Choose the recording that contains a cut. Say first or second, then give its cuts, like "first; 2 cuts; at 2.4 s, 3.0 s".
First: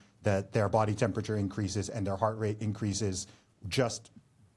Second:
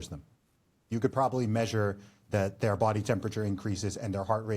second; 1 cut; at 0.9 s